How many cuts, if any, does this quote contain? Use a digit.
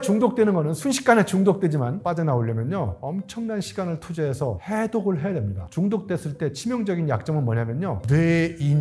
3